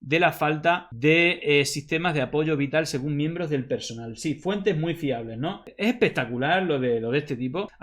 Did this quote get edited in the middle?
yes; 1 cut; at 5.7 s

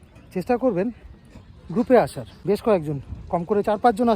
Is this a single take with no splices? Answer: no; 1 cut; at 2.3 s

